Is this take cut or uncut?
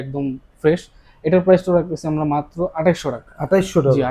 uncut